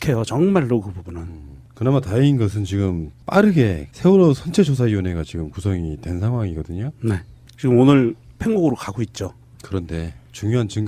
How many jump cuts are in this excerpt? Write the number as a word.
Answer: zero